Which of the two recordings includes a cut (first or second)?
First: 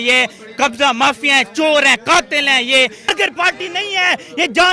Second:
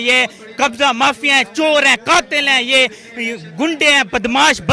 first